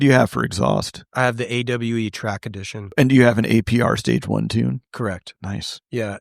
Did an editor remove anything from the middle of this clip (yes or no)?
yes